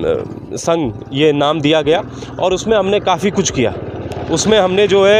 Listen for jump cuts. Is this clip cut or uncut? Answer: uncut